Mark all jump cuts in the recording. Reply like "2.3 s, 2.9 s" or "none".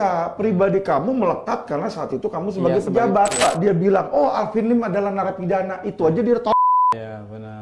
3.4 s